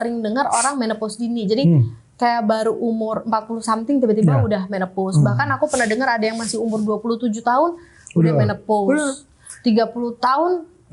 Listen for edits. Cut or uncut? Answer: uncut